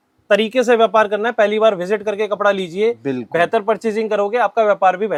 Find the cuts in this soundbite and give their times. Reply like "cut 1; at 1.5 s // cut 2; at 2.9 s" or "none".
none